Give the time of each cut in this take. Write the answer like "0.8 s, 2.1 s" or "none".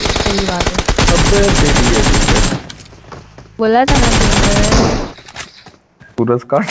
none